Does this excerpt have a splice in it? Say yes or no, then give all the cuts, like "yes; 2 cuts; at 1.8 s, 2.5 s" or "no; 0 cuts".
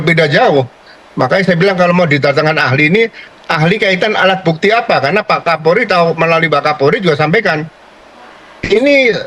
no; 0 cuts